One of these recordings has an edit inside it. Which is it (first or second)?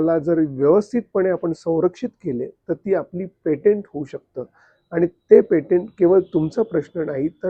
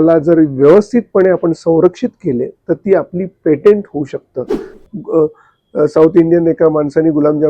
second